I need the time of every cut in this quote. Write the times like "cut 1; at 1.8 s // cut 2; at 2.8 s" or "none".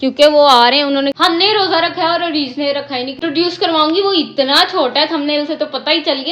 cut 1; at 1.2 s // cut 2; at 3.2 s